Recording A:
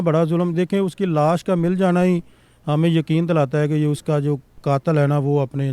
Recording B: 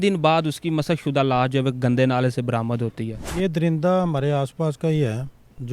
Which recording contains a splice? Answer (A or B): B